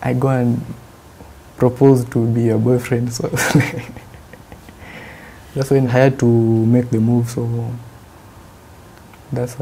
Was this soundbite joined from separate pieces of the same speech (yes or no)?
yes